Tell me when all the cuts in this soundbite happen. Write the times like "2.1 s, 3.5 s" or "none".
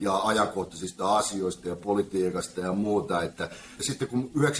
3.7 s